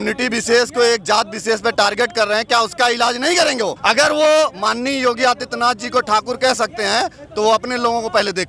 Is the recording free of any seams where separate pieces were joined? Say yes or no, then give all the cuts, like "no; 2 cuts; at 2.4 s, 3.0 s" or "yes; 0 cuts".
yes; 0 cuts